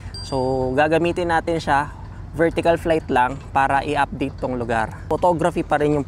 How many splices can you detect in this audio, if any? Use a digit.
1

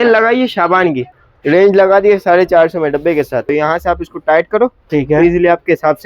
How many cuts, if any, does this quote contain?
2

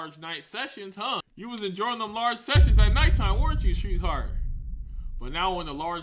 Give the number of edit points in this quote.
1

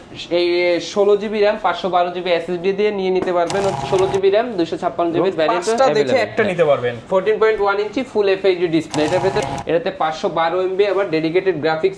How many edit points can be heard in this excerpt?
2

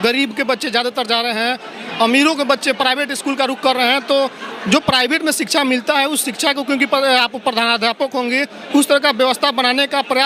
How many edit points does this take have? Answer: 0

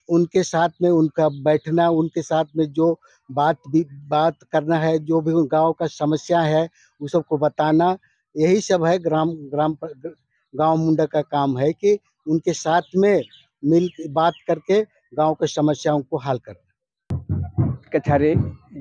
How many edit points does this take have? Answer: 1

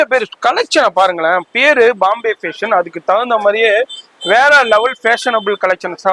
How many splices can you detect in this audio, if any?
0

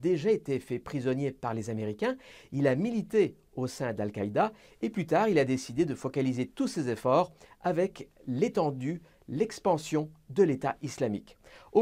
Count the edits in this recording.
1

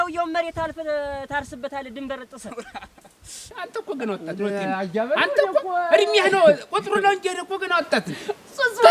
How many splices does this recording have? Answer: 1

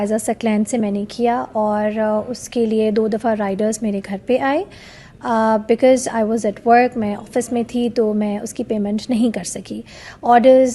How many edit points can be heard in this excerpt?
0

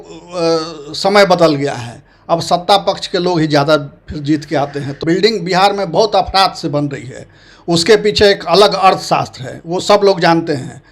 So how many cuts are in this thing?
1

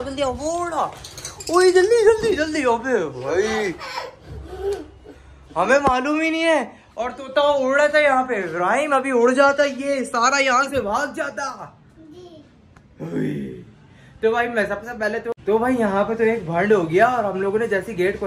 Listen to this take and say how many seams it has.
0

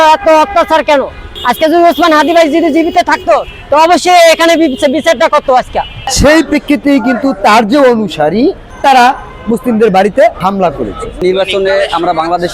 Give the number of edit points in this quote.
3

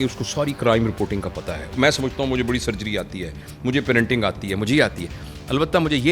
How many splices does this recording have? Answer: 1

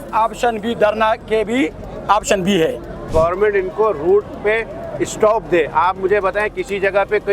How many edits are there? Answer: 1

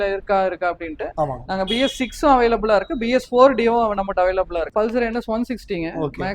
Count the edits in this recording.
1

